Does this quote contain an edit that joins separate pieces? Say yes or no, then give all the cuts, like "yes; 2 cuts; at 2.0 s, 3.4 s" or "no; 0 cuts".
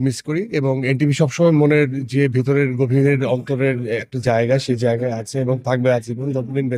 no; 0 cuts